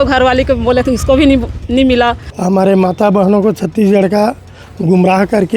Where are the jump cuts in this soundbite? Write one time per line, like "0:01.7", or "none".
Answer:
0:02.3